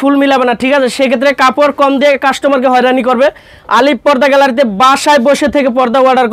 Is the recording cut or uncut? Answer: uncut